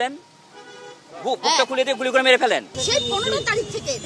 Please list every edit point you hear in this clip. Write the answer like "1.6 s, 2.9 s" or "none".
2.8 s

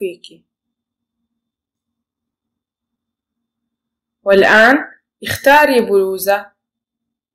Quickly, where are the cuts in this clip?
none

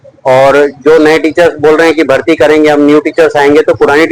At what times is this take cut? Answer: none

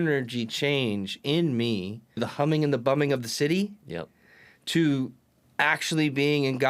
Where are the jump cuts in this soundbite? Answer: 2.3 s

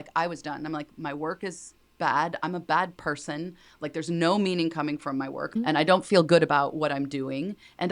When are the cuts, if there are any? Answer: 5.6 s

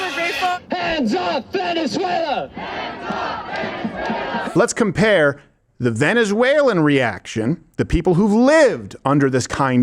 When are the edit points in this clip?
4.4 s

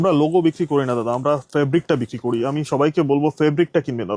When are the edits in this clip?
none

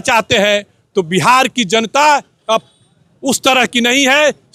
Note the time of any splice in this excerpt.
none

